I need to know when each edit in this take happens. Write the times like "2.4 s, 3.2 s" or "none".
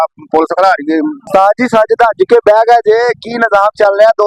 1.2 s